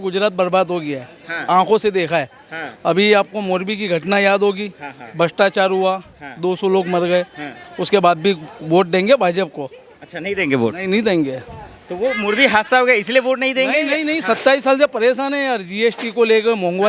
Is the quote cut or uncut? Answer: uncut